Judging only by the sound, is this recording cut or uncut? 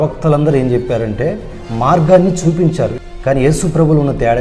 cut